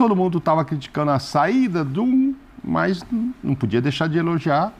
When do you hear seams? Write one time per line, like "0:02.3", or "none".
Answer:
none